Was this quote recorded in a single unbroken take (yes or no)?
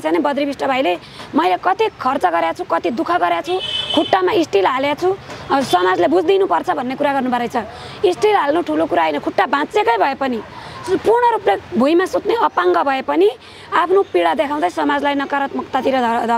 yes